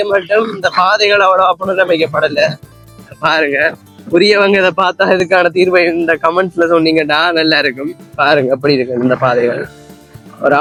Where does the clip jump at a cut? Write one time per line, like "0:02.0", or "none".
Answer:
none